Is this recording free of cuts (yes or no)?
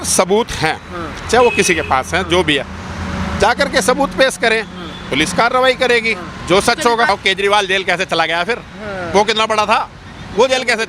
no